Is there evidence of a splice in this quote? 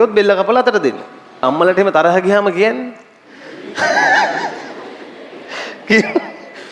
yes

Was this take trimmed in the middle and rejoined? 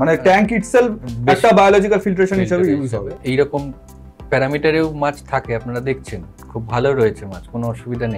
yes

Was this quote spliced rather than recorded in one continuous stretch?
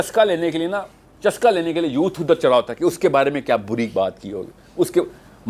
no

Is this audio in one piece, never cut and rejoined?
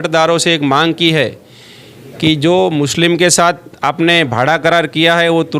yes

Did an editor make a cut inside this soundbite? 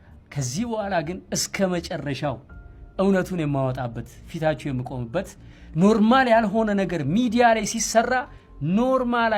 no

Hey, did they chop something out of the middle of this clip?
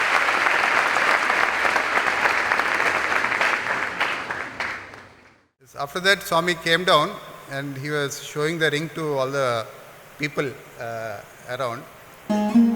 no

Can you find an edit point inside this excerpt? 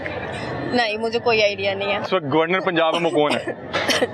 yes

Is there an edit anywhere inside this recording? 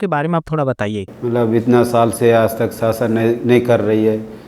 yes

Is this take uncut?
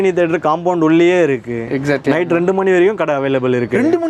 yes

